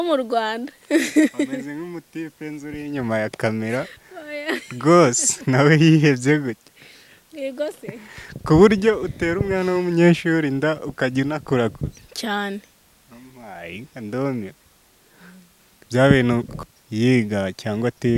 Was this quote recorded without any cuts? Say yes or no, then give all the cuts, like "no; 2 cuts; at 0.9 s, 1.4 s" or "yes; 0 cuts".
no; 1 cut; at 16.6 s